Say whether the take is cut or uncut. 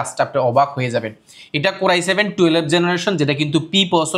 uncut